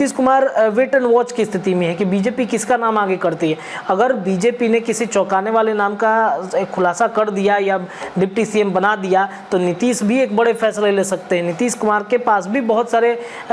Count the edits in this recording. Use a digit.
0